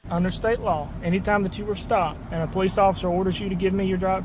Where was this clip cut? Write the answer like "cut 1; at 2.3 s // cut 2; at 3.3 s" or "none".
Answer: cut 1; at 0.9 s // cut 2; at 2.2 s

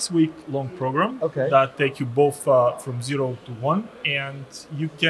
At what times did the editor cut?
cut 1; at 1.7 s // cut 2; at 4.0 s

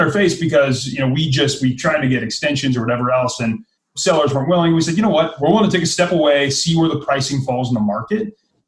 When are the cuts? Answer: cut 1; at 3.9 s // cut 2; at 5.3 s

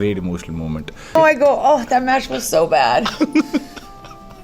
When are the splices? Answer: cut 1; at 1.1 s

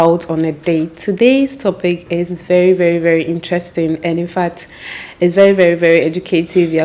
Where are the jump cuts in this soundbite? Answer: none

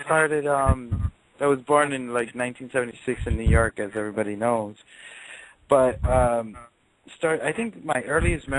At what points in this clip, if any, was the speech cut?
cut 1; at 6.2 s

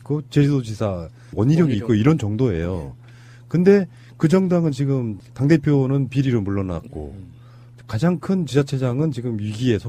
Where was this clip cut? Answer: cut 1; at 1.7 s

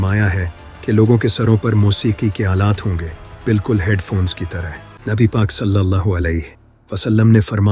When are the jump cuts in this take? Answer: cut 1; at 4.9 s

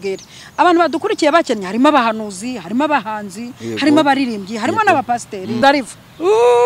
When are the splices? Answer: cut 1; at 5.6 s

